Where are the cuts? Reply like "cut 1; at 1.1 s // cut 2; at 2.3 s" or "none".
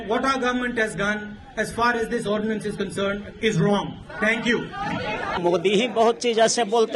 cut 1; at 5.4 s

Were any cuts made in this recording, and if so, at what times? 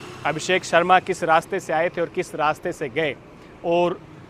none

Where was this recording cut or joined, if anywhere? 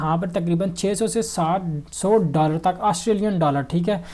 none

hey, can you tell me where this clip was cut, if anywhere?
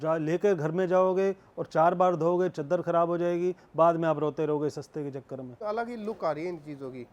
cut 1; at 5.6 s

